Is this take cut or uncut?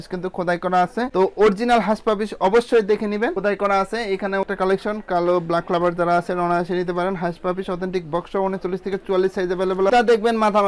cut